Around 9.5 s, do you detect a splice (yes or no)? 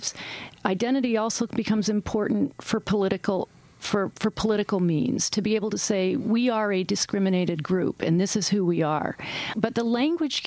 yes